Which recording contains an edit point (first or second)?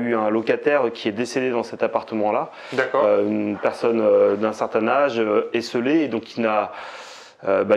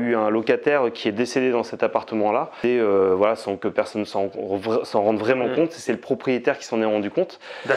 second